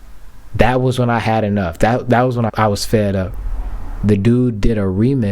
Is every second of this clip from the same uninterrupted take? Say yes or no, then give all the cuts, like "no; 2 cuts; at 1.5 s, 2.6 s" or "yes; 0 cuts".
no; 1 cut; at 2.5 s